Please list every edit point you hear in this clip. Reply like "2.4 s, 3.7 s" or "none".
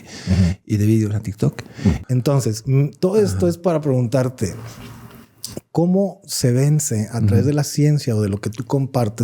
2.0 s